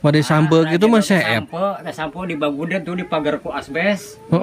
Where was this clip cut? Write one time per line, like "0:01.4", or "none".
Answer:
none